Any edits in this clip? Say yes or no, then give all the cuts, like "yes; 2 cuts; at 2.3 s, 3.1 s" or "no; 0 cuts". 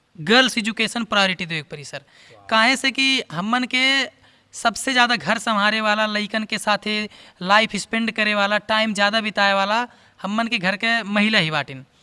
no; 0 cuts